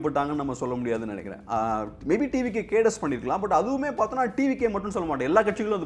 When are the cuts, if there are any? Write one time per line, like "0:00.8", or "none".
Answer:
none

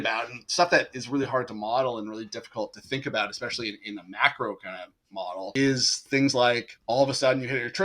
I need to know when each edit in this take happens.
0:05.5
0:06.7

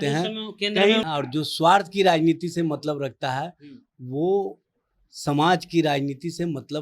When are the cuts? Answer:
0:01.0

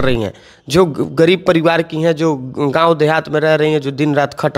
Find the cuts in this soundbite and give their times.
none

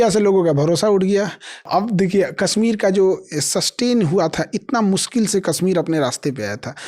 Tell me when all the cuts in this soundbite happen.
0:01.6

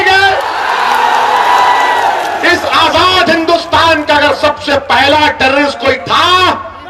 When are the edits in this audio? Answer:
none

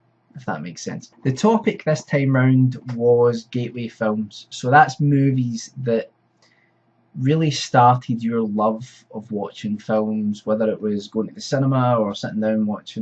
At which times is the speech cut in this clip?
0:05.3

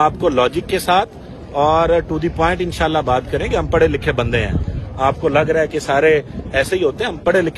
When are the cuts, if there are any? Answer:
none

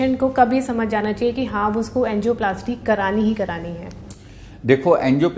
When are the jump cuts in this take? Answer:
none

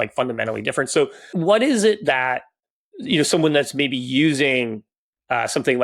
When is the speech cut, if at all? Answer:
0:01.3

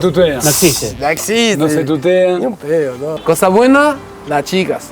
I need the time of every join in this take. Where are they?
0:03.2

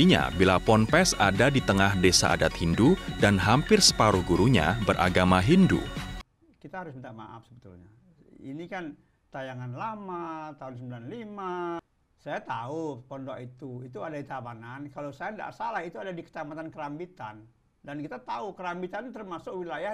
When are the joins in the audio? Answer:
0:06.2
0:11.8

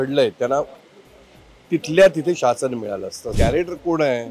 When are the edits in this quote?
0:03.2

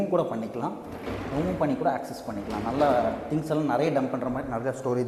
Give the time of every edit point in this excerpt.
none

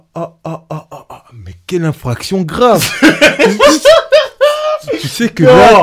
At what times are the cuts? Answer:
none

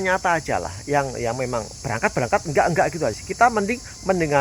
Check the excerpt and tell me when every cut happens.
0:03.2

